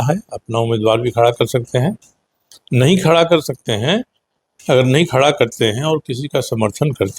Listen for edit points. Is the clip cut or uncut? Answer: uncut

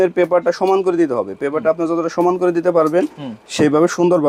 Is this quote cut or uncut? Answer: uncut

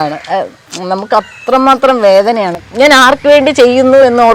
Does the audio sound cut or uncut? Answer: cut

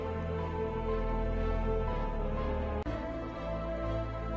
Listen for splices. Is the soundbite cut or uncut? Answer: uncut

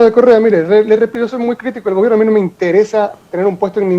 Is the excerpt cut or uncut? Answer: cut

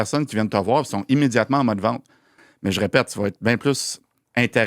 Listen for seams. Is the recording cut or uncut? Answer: cut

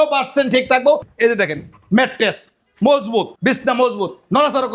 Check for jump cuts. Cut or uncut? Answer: cut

